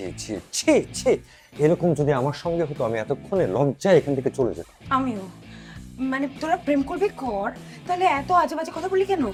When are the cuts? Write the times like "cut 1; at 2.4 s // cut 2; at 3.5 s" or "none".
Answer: none